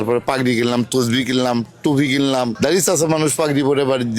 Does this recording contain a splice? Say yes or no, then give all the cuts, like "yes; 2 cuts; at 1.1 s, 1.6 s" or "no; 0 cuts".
no; 0 cuts